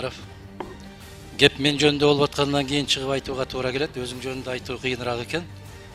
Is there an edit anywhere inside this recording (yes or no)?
no